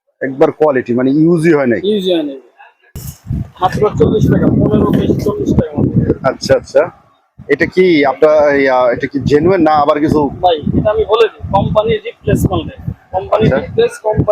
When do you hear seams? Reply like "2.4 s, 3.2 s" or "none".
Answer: 3.1 s